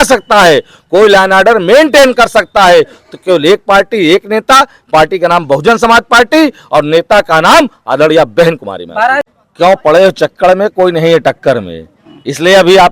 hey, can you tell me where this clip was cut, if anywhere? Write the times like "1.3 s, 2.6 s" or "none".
9.4 s

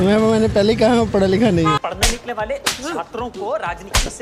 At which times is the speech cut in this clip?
none

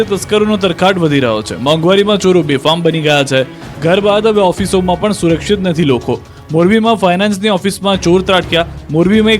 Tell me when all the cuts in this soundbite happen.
2.8 s

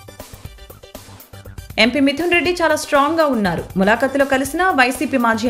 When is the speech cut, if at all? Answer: none

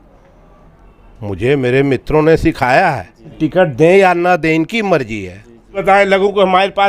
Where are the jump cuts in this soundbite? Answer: 3.4 s, 5.6 s

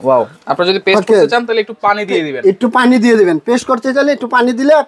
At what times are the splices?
none

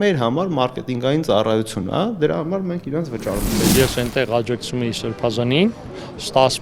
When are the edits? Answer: 3.6 s

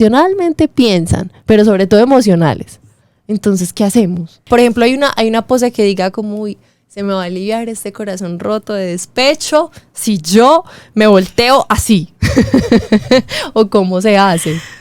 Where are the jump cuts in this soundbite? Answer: 4.4 s

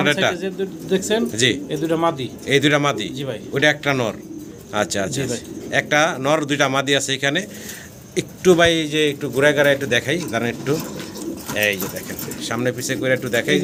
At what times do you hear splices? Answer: none

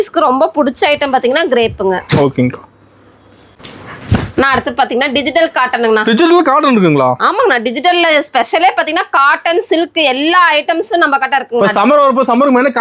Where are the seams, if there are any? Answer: none

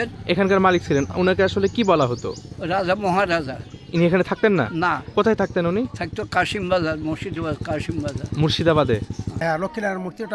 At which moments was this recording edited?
9.4 s

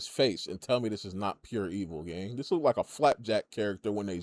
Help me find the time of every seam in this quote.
none

